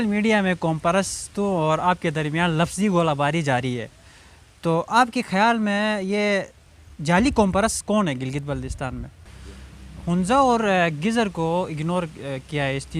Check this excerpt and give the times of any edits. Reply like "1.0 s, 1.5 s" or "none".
9.1 s